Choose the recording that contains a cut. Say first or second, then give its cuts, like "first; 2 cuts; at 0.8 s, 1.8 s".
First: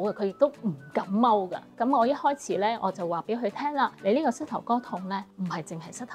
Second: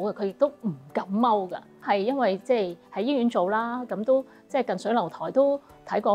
first; 3 cuts; at 1.7 s, 4.0 s, 5.3 s